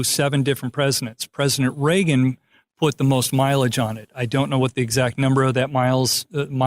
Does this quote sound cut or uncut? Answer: uncut